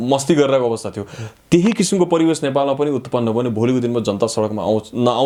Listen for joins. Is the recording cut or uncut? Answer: uncut